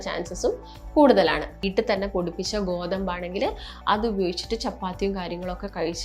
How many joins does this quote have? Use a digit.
1